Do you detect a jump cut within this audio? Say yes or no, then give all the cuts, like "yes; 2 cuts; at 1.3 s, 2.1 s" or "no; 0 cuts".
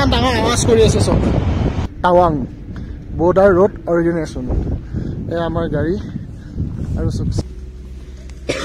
yes; 2 cuts; at 1.8 s, 7.4 s